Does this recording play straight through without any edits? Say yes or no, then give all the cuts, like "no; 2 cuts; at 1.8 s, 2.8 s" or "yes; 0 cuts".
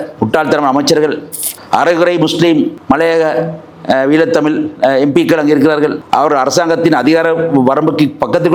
yes; 0 cuts